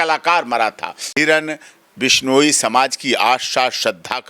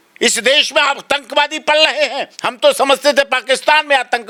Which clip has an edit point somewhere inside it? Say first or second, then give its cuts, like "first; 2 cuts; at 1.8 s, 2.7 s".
first; 1 cut; at 1.0 s